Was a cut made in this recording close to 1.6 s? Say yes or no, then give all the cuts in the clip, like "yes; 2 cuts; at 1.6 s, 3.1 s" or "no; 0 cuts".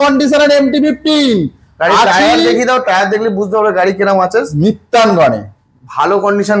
no; 0 cuts